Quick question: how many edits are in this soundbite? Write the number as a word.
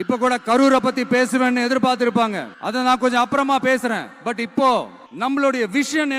two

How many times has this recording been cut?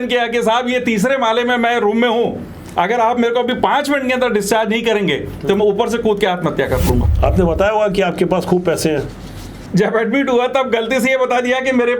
two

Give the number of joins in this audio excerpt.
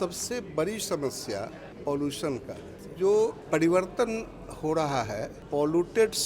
four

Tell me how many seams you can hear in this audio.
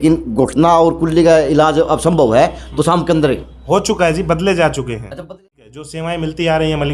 one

